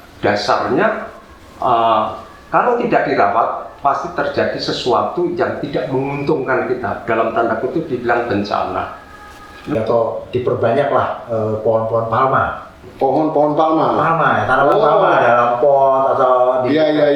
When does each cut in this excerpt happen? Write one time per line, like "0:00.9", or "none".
0:09.8